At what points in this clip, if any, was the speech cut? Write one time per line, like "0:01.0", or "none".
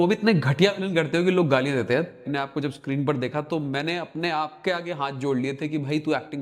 0:02.2